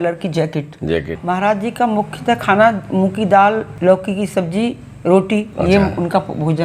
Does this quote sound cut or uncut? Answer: cut